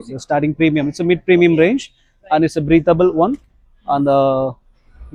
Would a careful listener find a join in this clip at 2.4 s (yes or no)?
no